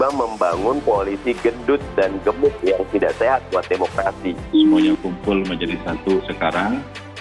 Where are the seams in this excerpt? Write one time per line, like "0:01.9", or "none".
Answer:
0:04.3